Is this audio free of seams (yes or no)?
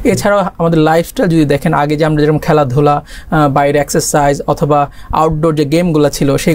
yes